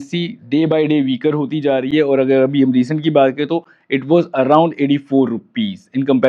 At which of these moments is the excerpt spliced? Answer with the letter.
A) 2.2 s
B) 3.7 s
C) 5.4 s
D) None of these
D